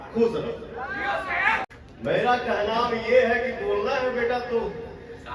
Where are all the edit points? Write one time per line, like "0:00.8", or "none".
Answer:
0:01.6